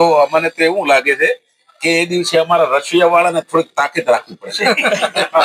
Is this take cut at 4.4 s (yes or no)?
no